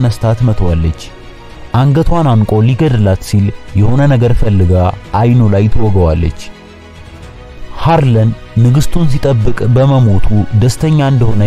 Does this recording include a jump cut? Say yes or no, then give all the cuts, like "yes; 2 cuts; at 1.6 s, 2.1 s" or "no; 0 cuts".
no; 0 cuts